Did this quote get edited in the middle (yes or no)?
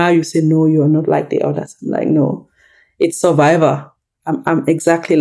no